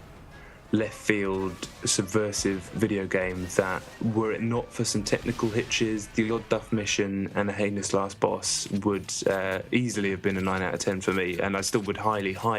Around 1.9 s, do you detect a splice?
yes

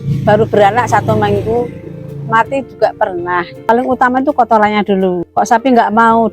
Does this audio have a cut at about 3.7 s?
yes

